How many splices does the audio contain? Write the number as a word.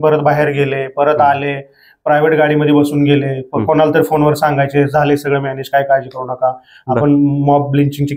zero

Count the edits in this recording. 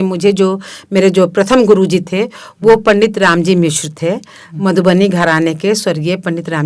zero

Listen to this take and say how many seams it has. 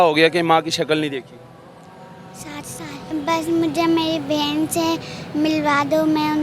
one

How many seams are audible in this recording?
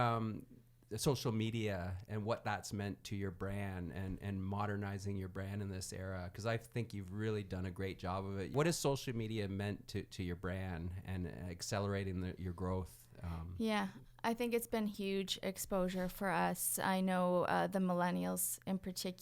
one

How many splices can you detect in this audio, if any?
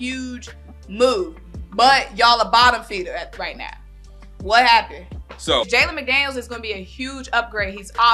one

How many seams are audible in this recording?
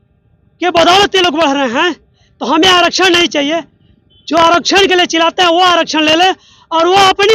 zero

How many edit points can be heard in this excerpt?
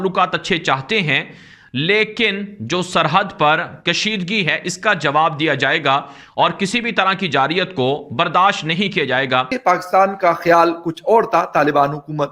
one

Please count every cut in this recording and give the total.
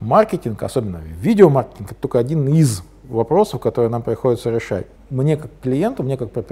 one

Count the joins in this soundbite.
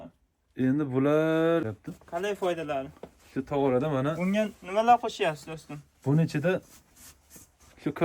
one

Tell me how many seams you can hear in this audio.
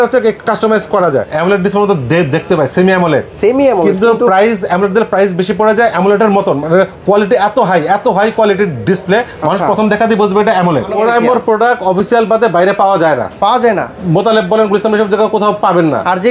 two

